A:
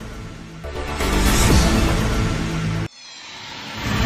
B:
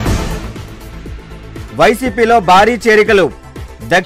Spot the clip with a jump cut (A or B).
B